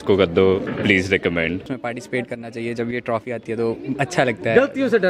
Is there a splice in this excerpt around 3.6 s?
no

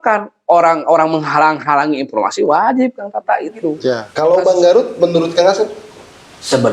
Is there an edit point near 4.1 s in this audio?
yes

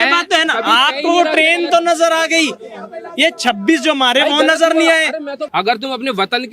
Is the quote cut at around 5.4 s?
yes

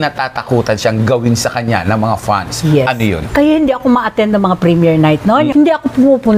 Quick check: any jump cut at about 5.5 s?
yes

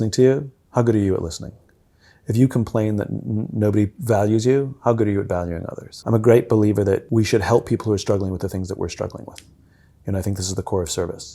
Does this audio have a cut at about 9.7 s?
no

